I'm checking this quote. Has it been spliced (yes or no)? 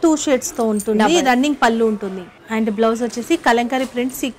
yes